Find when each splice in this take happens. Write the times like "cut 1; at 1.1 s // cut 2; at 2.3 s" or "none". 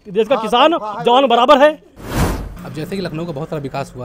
cut 1; at 2.1 s